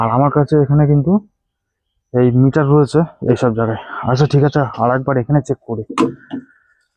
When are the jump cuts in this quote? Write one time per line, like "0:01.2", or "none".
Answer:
0:03.2